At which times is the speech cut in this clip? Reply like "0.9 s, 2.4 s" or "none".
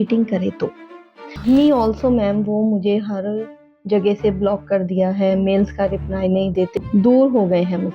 1.3 s, 6.7 s